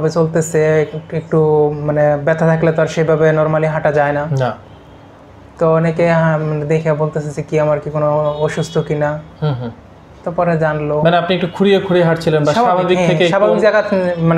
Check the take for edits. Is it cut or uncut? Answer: uncut